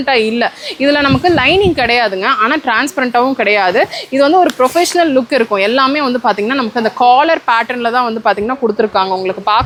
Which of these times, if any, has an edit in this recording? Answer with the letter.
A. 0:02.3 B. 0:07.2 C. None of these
C